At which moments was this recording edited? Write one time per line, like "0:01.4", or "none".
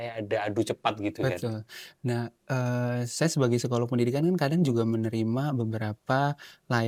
none